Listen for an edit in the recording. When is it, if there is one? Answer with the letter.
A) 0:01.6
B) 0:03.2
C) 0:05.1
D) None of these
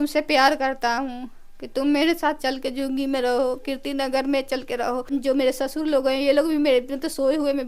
C